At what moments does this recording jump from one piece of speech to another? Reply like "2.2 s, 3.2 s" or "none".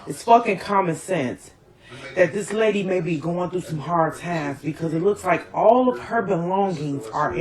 4.4 s